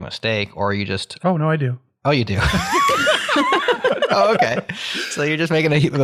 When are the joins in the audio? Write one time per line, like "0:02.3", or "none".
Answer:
none